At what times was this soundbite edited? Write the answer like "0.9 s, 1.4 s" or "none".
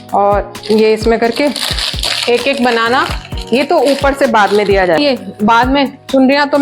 5.0 s